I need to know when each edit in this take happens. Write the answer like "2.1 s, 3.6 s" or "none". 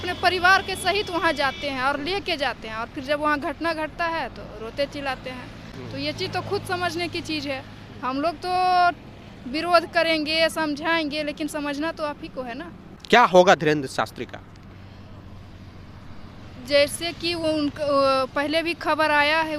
none